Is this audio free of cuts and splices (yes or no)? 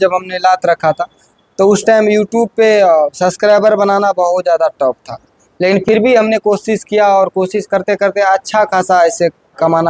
yes